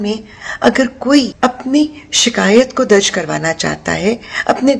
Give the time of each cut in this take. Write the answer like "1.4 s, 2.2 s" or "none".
1.3 s

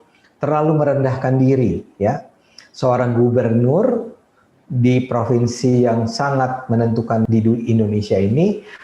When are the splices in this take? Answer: 7.2 s

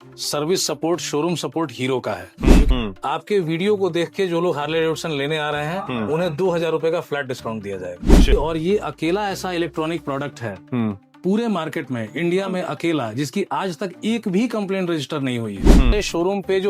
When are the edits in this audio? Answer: 2.7 s, 8.3 s, 15.9 s

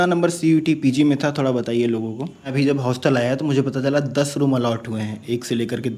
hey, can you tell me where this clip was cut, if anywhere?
2.5 s

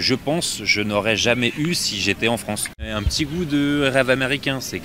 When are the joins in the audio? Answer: 3.0 s

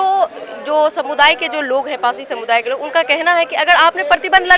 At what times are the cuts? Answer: none

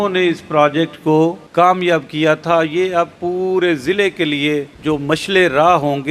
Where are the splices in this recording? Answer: 1.4 s, 4.7 s

